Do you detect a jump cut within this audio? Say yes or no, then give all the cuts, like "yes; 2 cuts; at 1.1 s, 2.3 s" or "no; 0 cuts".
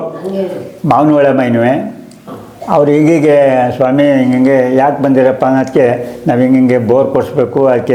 no; 0 cuts